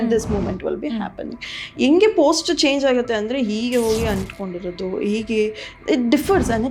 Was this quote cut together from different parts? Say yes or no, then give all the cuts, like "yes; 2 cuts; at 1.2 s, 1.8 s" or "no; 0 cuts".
no; 0 cuts